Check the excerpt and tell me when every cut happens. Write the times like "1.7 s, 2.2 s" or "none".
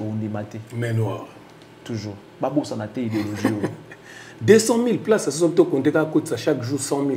none